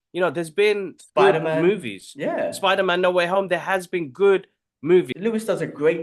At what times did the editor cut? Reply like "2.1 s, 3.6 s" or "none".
5.1 s